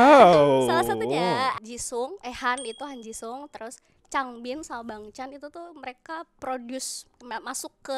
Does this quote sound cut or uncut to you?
cut